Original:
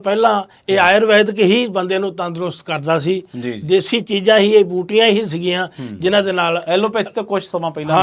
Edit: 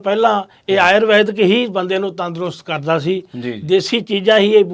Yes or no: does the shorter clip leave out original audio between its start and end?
no